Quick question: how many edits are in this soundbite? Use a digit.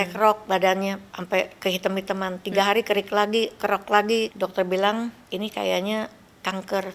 2